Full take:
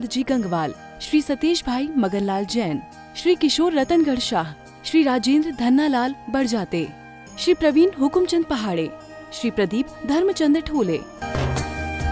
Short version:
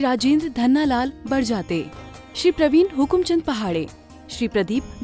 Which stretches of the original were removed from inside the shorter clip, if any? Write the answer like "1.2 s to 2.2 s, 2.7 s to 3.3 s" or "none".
none